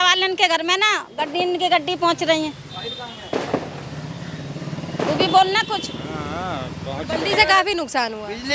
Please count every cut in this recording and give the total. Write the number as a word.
zero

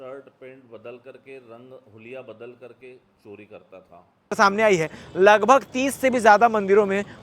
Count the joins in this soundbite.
one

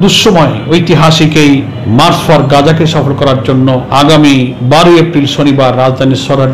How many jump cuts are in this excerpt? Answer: three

